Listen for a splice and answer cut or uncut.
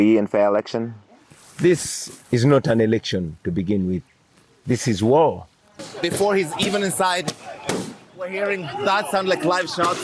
cut